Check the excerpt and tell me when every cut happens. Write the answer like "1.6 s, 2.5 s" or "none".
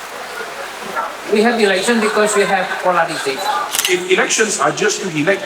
3.8 s